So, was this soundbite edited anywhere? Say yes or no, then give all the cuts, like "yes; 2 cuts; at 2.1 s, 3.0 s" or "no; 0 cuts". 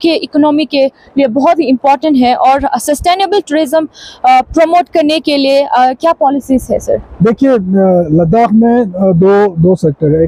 no; 0 cuts